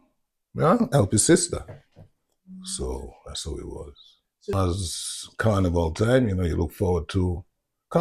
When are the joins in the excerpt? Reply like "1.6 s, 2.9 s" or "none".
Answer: 4.5 s